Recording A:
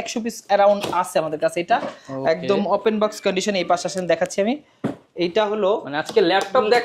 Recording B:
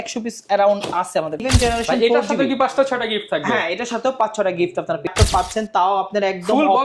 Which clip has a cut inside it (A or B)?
B